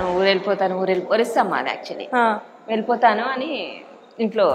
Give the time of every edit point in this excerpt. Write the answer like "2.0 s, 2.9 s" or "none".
none